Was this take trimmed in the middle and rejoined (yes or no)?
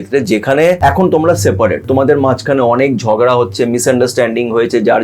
yes